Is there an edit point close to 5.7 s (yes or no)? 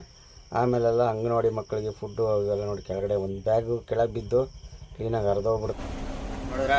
yes